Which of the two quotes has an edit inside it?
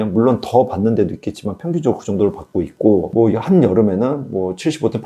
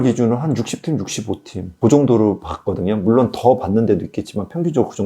first; 1 cut; at 3.1 s

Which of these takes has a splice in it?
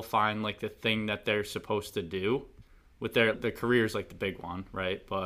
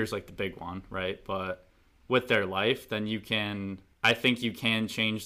second; 1 cut; at 3.8 s

